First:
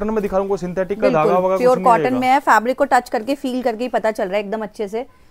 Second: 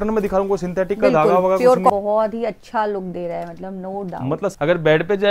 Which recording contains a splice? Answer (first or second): second